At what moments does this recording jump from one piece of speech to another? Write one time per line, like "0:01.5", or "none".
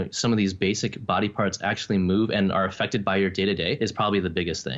0:03.8